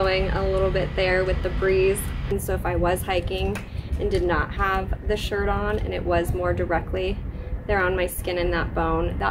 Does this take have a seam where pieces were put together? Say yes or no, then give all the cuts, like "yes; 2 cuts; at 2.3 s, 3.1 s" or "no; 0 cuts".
yes; 1 cut; at 2.4 s